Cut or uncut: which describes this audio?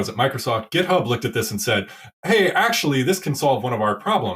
uncut